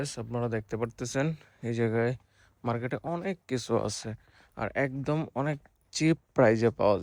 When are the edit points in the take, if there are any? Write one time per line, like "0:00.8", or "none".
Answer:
none